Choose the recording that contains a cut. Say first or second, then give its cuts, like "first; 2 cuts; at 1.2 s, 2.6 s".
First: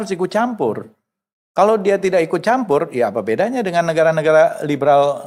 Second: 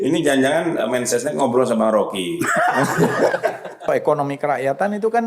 second; 1 cut; at 3.9 s